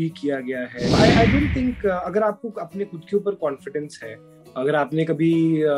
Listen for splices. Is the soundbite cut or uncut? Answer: cut